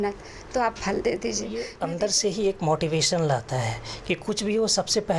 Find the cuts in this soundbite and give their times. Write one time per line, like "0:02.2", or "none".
0:01.7